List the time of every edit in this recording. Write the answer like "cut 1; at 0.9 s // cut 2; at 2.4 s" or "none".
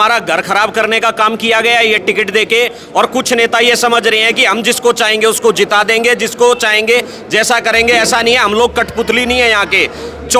none